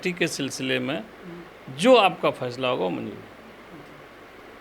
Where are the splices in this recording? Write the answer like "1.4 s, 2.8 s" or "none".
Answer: none